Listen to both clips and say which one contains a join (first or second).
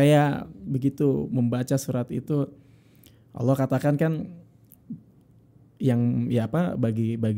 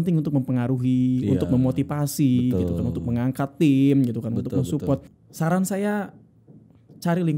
second